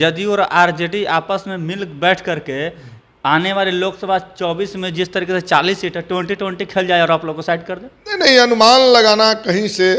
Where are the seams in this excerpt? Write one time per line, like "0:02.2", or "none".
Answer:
none